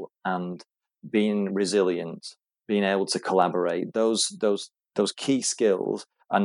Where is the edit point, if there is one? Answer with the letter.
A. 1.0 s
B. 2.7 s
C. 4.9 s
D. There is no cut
D